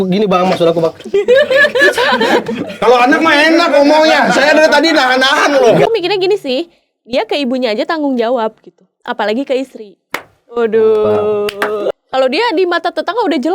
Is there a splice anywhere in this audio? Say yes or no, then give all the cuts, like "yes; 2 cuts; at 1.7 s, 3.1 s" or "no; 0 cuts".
yes; 2 cuts; at 5.9 s, 11.8 s